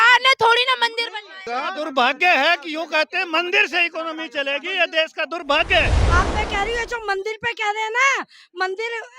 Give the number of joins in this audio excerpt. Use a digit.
2